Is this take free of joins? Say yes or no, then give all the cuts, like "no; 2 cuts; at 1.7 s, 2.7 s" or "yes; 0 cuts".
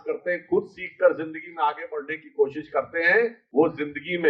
no; 1 cut; at 3.4 s